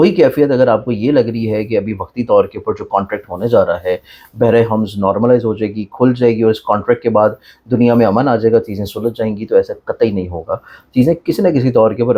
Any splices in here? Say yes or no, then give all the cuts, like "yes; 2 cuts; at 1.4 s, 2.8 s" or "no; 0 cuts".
no; 0 cuts